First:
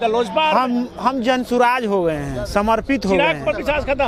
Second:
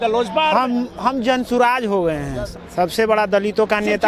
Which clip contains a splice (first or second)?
second